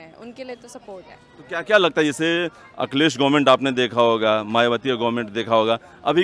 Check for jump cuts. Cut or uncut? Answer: uncut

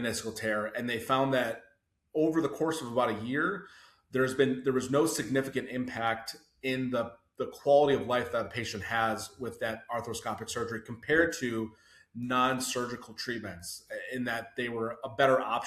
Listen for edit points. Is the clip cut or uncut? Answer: uncut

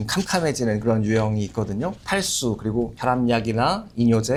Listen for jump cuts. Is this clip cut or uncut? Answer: uncut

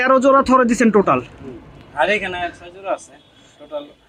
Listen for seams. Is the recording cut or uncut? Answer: uncut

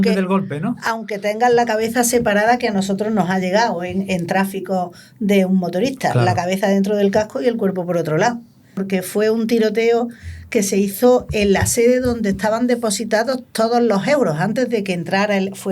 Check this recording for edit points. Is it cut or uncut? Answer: cut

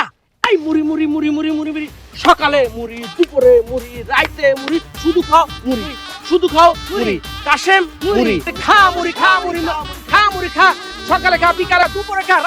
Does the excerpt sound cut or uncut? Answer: uncut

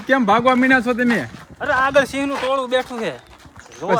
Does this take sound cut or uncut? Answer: uncut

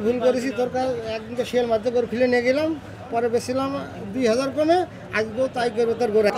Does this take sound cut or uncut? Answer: uncut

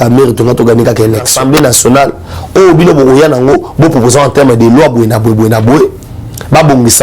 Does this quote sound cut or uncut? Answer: cut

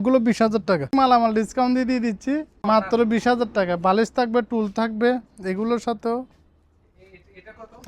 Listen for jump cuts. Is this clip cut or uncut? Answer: cut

